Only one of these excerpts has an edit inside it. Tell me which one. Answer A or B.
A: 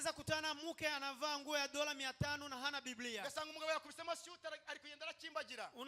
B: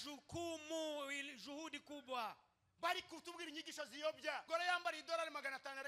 B